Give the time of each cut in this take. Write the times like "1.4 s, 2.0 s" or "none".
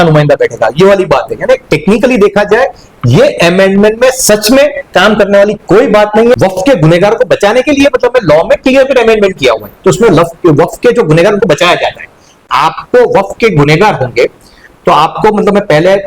6.4 s, 12.5 s